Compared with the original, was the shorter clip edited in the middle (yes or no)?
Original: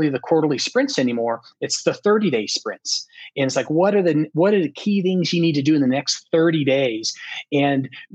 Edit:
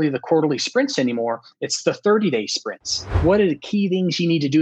yes